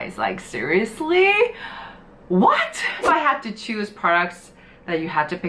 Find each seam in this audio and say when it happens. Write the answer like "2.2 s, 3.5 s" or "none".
3.1 s